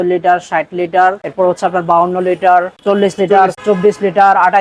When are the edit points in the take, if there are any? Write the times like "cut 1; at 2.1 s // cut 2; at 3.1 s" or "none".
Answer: cut 1; at 1.2 s // cut 2; at 3.5 s